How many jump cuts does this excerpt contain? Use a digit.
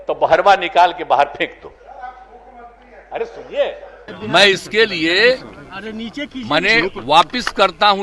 1